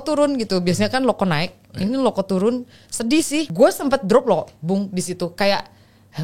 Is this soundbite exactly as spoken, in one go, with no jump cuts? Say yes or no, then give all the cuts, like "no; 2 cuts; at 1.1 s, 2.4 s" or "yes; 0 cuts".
no; 1 cut; at 3.5 s